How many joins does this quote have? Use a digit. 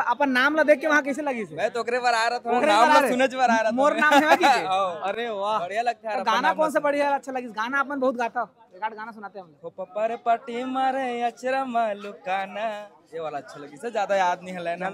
0